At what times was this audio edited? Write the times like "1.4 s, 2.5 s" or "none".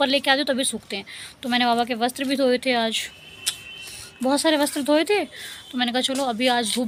none